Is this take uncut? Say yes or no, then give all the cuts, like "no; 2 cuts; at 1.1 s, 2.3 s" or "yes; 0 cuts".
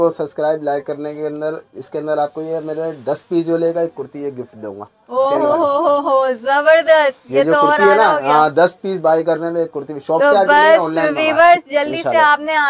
yes; 0 cuts